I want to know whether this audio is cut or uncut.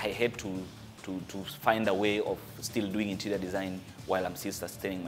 uncut